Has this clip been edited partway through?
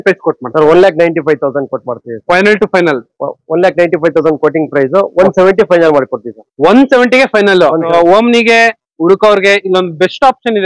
yes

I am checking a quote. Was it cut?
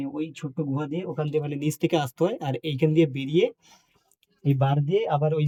no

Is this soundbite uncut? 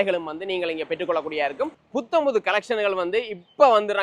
no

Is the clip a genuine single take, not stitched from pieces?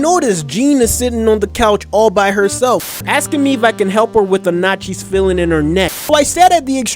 no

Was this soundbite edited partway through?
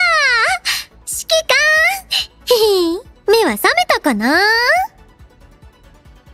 yes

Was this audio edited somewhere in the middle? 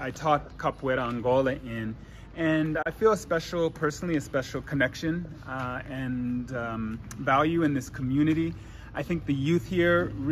no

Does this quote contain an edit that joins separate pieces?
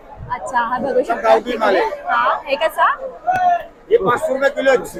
no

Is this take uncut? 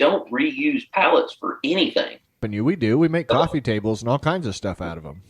no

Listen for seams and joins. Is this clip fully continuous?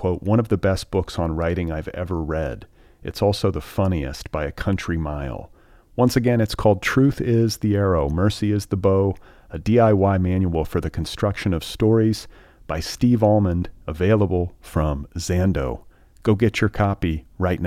yes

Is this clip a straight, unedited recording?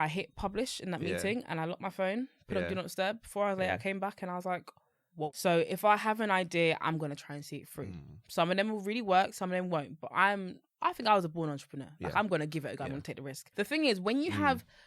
no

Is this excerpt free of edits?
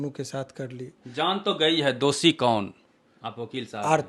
no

